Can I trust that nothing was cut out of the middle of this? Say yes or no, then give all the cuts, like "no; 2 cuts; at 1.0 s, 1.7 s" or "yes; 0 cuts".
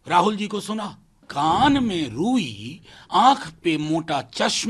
no; 1 cut; at 1.3 s